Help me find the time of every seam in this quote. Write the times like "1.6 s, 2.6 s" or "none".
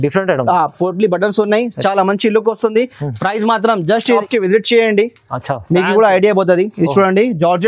4.2 s